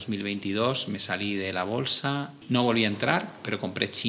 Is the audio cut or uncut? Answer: cut